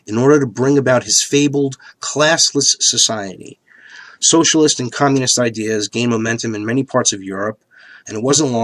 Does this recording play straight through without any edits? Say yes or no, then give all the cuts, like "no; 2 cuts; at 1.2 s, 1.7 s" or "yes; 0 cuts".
no; 1 cut; at 1.2 s